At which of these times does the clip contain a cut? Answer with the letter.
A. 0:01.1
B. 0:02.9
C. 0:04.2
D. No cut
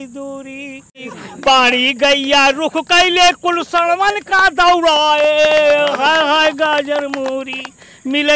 A